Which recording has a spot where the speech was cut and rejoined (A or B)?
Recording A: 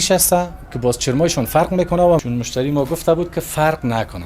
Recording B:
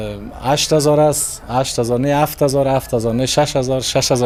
A